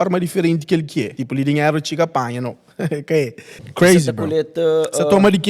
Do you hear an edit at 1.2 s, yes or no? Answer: yes